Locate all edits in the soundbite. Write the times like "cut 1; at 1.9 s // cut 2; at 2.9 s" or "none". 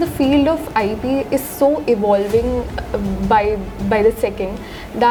none

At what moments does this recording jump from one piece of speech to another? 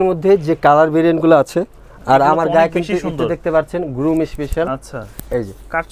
none

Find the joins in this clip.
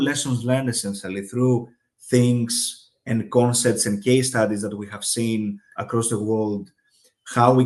none

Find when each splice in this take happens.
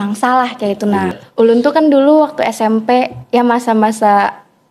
cut 1; at 1.2 s

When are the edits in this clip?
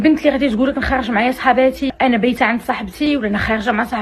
cut 1; at 1.9 s // cut 2; at 3.1 s

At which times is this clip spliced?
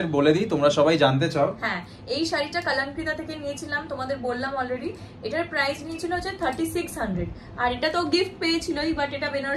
none

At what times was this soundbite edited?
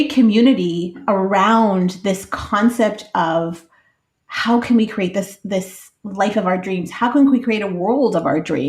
cut 1; at 1.0 s

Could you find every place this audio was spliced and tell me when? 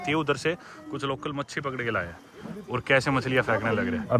none

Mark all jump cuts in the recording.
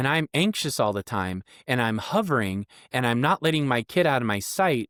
none

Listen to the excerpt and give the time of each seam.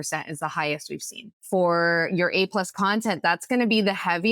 cut 1; at 1.3 s

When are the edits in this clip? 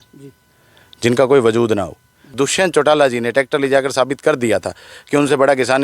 cut 1; at 2.3 s

